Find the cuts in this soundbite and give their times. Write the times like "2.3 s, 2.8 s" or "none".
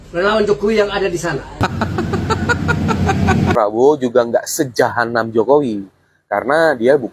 3.5 s